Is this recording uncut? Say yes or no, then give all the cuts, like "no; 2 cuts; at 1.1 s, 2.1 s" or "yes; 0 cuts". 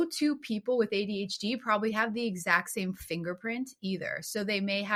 yes; 0 cuts